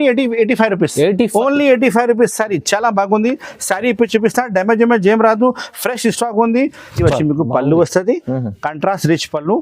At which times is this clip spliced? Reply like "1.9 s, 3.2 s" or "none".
6.9 s